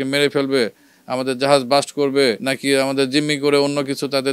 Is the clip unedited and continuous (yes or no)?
no